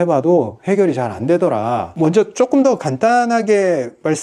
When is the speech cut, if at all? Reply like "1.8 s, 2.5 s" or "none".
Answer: 1.9 s